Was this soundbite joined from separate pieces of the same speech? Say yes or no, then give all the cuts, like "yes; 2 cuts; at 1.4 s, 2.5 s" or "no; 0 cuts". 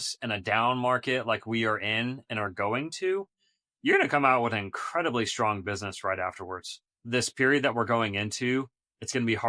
yes; 1 cut; at 7.0 s